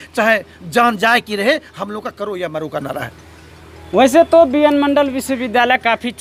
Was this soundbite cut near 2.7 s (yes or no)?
no